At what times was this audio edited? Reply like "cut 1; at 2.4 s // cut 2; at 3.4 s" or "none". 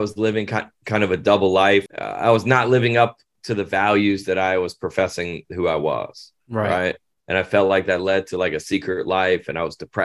cut 1; at 1.9 s